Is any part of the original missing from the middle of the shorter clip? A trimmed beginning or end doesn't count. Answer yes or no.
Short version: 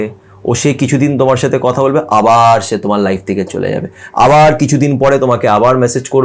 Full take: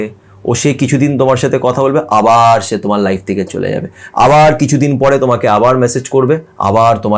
no